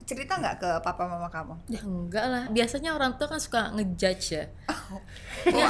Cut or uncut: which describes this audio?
cut